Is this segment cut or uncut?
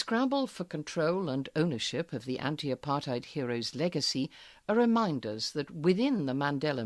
cut